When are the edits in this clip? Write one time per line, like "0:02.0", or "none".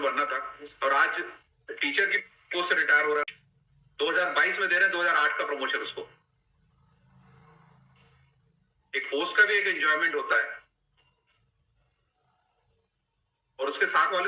0:03.2